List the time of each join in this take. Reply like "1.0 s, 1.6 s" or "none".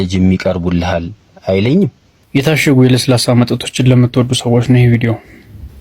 2.1 s